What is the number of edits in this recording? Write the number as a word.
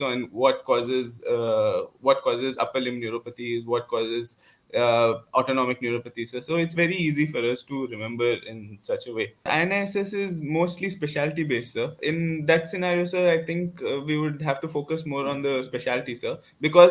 two